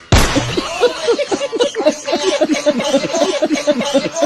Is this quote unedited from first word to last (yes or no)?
no